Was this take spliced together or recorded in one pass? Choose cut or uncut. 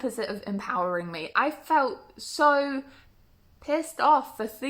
uncut